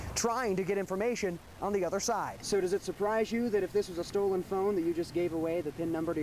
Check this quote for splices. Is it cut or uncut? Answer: cut